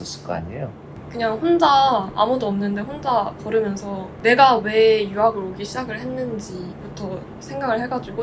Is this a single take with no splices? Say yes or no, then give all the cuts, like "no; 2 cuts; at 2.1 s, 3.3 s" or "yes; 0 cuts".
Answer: no; 2 cuts; at 0.9 s, 4.1 s